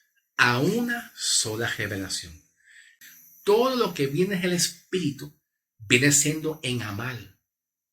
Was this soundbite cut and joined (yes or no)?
yes